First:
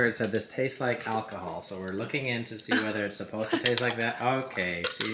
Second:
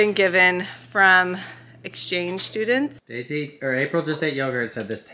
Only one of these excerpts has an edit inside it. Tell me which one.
second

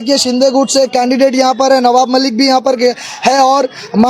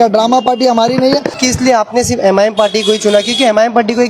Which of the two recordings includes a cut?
second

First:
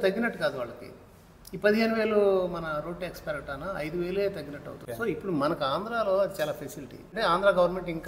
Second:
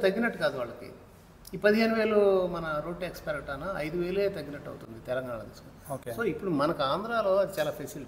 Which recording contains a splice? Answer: first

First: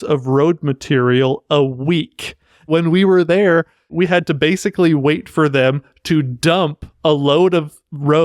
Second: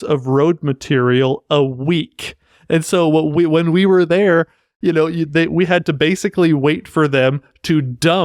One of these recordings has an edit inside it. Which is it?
first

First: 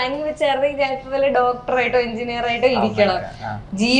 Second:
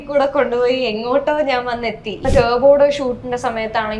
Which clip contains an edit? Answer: second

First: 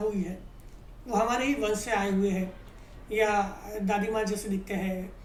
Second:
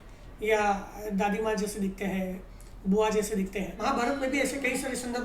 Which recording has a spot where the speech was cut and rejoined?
second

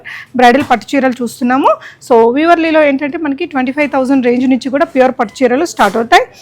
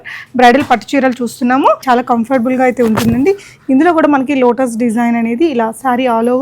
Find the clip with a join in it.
second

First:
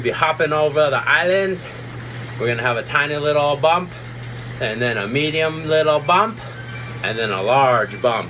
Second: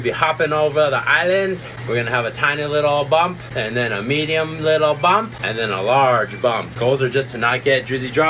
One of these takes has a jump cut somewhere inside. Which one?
second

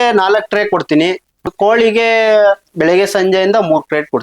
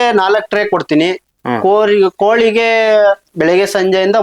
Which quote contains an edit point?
first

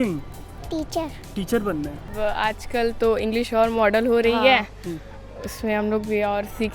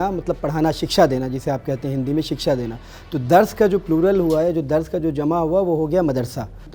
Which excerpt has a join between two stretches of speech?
first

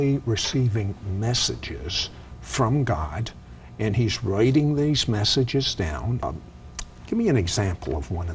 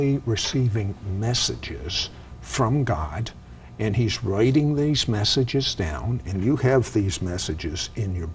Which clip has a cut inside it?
first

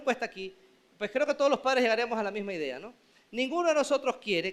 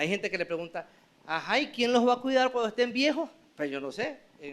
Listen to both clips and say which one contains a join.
second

